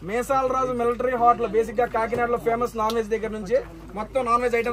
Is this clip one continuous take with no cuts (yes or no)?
yes